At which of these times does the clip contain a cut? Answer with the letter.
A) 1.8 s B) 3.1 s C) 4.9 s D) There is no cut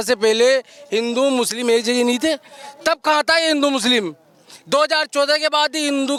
D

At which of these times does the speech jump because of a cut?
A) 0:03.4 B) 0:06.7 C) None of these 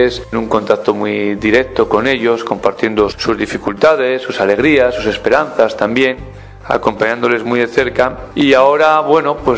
A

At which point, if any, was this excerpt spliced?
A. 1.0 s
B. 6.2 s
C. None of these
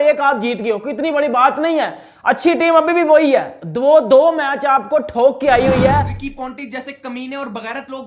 B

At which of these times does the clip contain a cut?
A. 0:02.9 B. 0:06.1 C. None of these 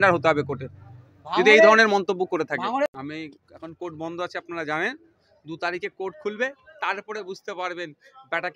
A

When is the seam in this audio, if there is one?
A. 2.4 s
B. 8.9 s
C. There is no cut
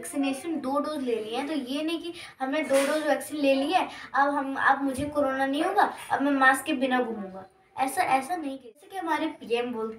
B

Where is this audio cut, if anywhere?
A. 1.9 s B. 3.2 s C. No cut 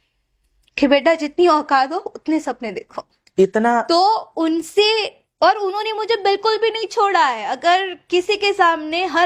C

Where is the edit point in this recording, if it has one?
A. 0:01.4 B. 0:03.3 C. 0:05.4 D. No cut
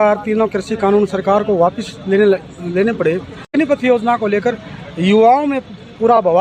D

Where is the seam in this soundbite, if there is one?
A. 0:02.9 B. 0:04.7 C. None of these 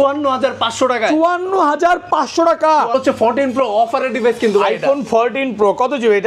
A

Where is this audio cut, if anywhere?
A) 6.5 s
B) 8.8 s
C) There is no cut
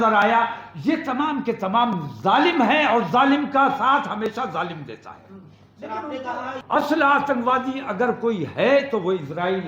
A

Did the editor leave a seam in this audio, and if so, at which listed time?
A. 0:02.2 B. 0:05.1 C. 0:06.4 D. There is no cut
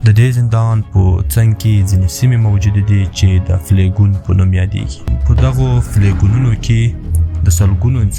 B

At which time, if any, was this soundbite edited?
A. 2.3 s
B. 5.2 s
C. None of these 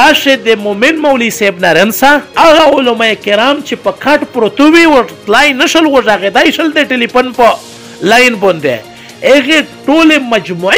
C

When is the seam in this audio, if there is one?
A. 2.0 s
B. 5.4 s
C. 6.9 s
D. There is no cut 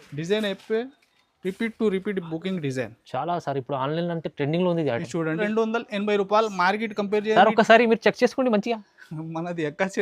B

